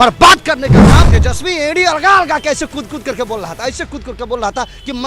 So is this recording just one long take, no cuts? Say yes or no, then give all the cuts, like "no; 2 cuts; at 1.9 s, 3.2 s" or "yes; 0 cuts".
no; 1 cut; at 1.1 s